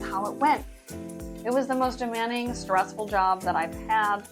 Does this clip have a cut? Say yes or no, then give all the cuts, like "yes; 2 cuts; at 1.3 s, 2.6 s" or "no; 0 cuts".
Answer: yes; 1 cut; at 1.3 s